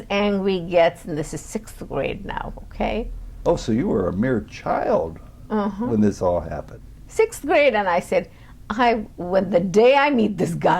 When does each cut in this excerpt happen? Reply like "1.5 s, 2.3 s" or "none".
6.7 s